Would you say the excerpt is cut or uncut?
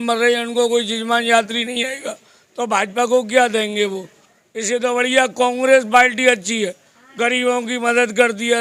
uncut